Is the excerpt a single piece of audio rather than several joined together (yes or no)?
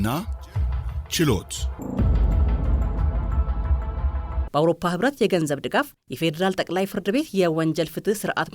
no